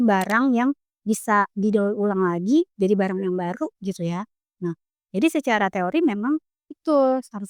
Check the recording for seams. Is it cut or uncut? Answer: uncut